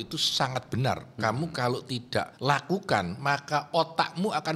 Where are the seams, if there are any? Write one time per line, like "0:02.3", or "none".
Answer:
0:02.3